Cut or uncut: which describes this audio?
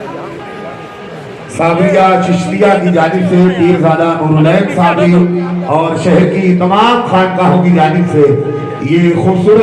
uncut